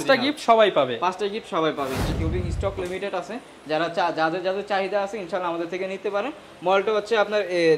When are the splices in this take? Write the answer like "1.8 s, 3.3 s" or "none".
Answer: 2.1 s